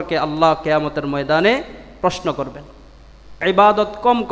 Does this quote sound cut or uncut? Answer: cut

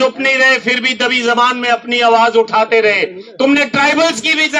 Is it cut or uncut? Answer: uncut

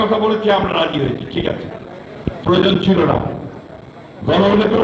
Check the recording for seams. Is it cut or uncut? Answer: uncut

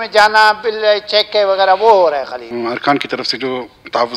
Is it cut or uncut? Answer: cut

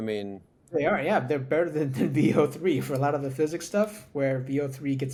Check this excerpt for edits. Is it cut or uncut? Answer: uncut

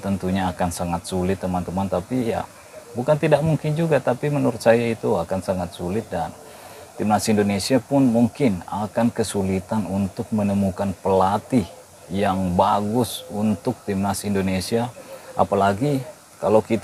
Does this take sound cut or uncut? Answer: uncut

